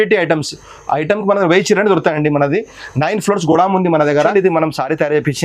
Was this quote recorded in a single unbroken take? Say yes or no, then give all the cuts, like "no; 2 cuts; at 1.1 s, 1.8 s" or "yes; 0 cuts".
no; 1 cut; at 4.3 s